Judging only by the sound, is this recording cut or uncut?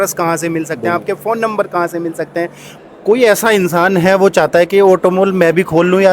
cut